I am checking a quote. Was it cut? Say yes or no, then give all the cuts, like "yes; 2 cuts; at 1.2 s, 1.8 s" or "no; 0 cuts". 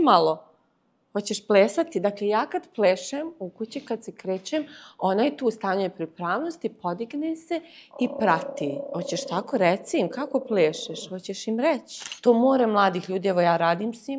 yes; 1 cut; at 12.0 s